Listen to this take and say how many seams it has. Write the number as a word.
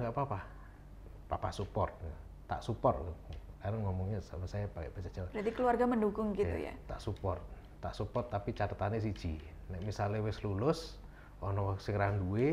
zero